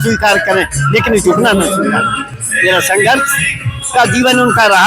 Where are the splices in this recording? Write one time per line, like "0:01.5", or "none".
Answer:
none